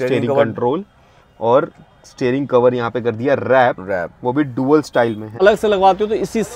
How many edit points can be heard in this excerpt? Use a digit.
1